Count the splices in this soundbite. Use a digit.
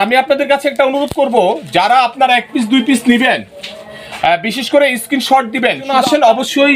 1